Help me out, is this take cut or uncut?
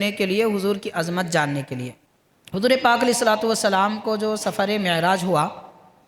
cut